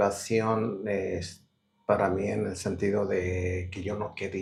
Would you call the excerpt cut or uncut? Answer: uncut